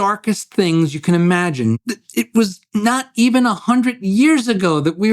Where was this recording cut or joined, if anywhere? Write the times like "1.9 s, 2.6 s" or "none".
1.8 s